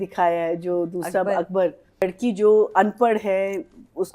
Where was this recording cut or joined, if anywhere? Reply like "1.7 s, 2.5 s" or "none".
2.0 s

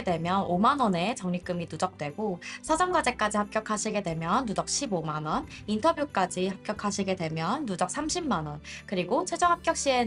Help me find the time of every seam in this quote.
none

